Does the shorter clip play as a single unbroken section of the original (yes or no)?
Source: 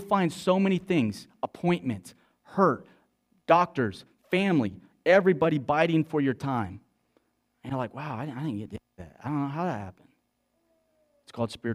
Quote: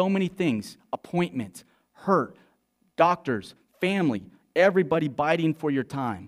yes